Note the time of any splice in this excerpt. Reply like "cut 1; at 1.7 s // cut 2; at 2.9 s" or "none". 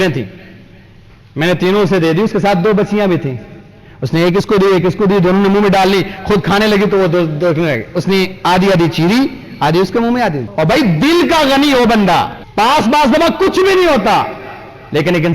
cut 1; at 10.4 s // cut 2; at 12.4 s

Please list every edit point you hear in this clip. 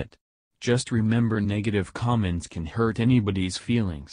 none

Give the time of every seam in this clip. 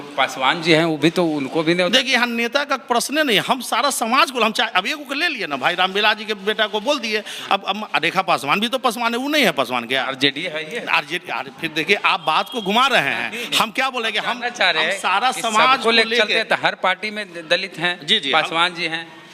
none

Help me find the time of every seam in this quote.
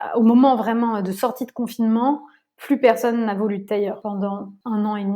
cut 1; at 4.2 s

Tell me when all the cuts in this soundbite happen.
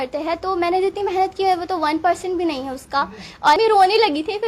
cut 1; at 3.6 s

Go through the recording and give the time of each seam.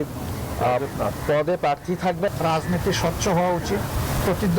cut 1; at 2.3 s

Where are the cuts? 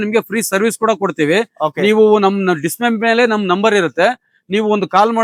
none

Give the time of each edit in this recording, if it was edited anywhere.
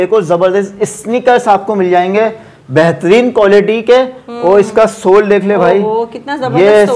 none

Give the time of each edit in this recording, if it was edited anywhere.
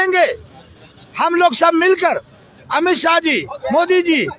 none

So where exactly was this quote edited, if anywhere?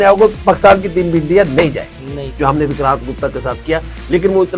cut 1; at 2.2 s

